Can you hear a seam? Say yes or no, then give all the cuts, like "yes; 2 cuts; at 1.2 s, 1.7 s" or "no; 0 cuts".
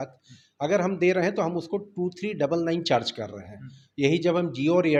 no; 0 cuts